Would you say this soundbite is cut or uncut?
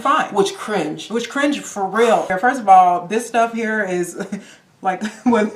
cut